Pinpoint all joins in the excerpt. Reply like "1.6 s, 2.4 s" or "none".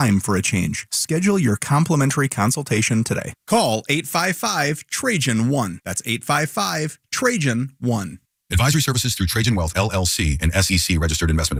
none